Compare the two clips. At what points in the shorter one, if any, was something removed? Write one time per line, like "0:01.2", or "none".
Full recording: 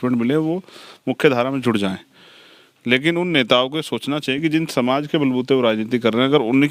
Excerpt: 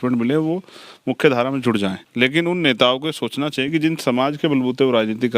0:02.0